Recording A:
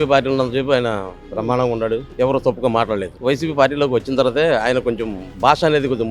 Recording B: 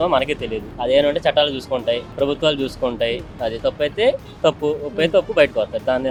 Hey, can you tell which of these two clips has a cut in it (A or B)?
A